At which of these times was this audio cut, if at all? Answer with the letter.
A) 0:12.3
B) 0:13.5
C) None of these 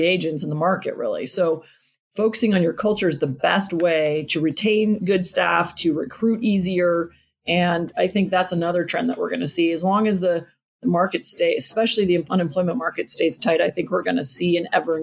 A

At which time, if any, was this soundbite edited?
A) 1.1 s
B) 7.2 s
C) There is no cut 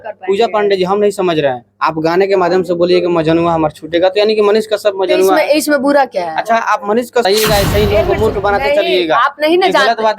B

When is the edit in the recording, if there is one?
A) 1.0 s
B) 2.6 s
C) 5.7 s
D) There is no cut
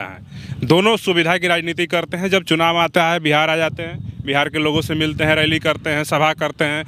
D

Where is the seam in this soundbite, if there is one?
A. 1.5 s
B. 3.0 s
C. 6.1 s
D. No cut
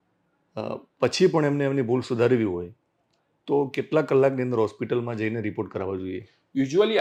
D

